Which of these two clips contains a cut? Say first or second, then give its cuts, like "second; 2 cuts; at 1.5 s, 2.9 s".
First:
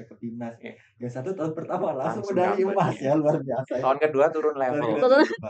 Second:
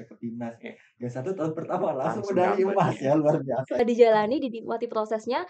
second; 1 cut; at 3.8 s